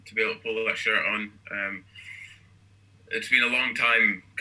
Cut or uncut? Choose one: uncut